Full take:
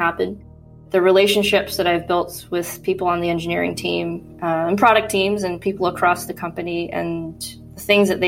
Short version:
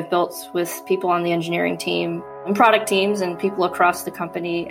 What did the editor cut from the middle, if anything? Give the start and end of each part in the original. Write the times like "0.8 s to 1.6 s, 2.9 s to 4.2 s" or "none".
4.4 s to 4.7 s